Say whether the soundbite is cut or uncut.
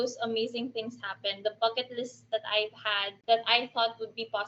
cut